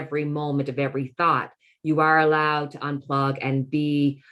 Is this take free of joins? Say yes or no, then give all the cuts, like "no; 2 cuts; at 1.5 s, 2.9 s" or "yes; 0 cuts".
yes; 0 cuts